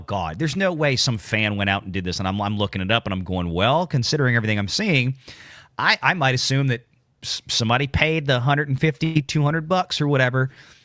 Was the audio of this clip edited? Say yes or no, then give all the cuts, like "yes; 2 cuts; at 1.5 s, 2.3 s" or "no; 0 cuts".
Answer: no; 0 cuts